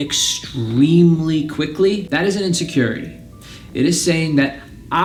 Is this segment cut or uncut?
uncut